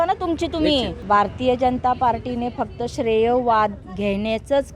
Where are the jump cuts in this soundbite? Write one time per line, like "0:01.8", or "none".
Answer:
0:00.9
0:03.9